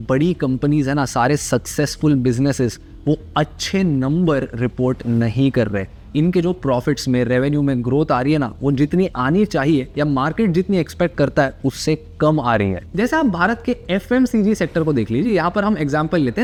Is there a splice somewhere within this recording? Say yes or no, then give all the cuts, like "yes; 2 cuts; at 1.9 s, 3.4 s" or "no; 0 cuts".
no; 0 cuts